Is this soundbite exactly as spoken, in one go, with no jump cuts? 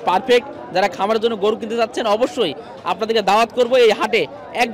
yes; 0 cuts

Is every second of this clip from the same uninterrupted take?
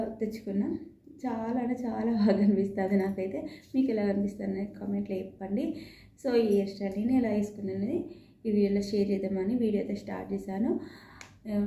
yes; 0 cuts

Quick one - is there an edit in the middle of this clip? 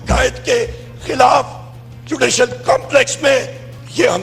no; 0 cuts

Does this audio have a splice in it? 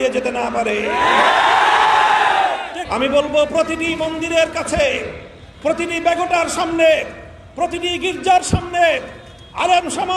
yes; 1 cut; at 2.8 s

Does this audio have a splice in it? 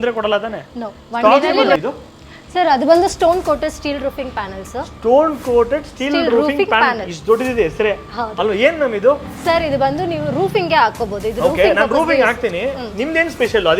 yes; 1 cut; at 1.8 s

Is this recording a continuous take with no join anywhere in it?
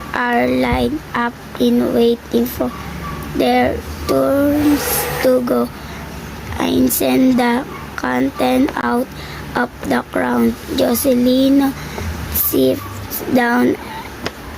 no; 1 cut; at 8.8 s

